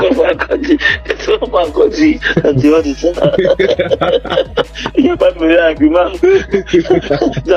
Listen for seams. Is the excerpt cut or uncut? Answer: uncut